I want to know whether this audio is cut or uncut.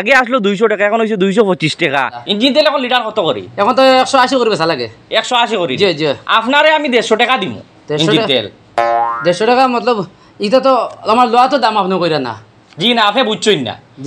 cut